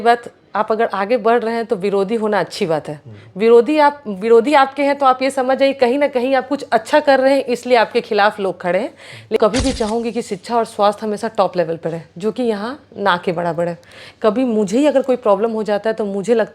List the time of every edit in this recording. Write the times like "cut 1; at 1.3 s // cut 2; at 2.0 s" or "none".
cut 1; at 9.4 s